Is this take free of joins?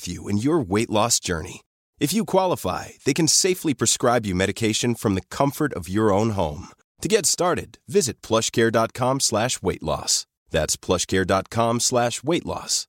yes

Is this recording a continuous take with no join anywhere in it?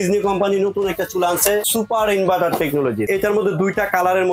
no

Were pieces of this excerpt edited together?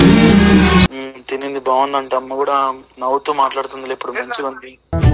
yes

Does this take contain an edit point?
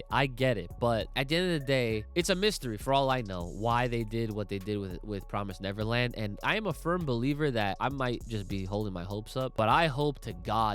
yes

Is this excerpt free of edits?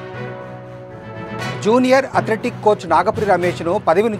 yes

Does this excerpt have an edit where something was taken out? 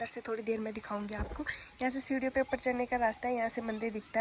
no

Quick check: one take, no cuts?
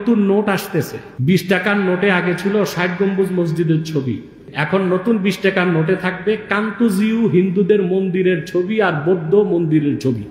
no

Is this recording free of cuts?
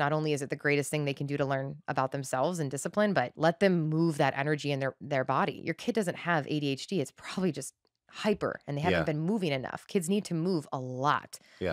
no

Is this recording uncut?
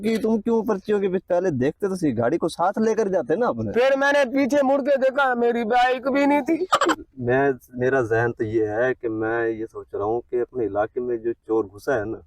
no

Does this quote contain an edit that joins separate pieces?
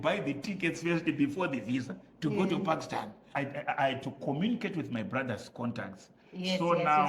yes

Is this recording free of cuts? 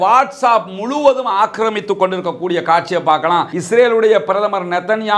no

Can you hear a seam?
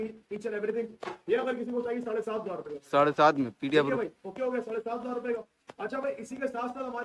no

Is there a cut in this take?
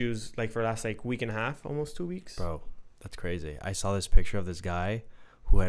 no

